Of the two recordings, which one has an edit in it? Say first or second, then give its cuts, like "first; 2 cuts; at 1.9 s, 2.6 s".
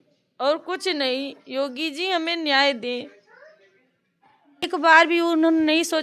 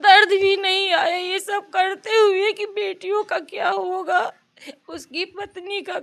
first; 1 cut; at 4.6 s